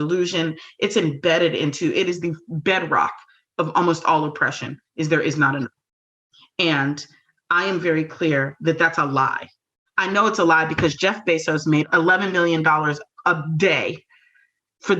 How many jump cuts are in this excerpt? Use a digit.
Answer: 1